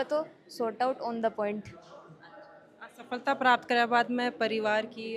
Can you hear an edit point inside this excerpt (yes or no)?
no